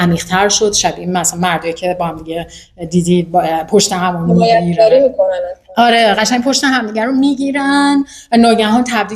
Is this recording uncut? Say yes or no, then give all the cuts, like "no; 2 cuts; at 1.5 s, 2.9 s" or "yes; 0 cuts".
yes; 0 cuts